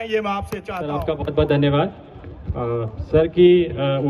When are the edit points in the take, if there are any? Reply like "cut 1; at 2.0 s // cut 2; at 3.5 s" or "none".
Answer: cut 1; at 1.0 s

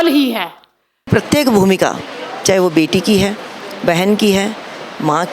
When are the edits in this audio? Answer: cut 1; at 1.1 s

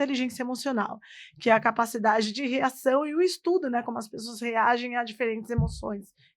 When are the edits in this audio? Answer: none

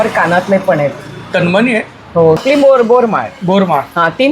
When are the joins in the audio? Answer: cut 1; at 2.4 s

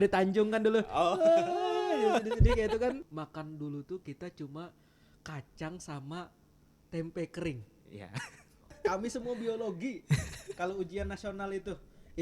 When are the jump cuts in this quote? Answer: cut 1; at 3.1 s // cut 2; at 8.7 s

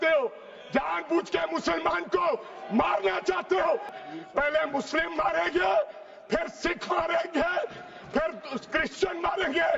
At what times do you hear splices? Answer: cut 1; at 4.0 s

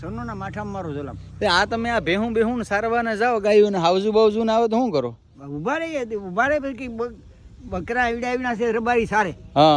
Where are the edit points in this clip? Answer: none

